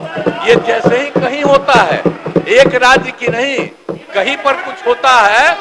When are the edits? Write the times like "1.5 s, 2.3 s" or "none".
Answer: none